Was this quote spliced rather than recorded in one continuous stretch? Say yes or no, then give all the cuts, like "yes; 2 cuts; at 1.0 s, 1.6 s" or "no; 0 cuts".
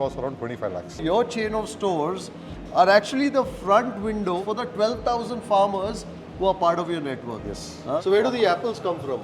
yes; 3 cuts; at 1.0 s, 4.4 s, 8.0 s